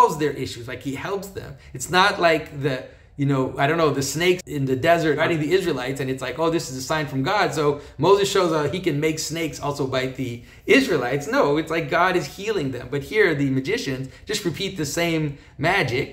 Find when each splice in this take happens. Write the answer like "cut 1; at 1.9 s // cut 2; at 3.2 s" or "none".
cut 1; at 4.4 s // cut 2; at 5.2 s